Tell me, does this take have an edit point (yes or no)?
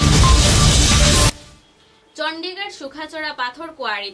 yes